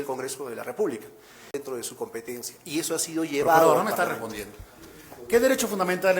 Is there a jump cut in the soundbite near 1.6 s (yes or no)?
yes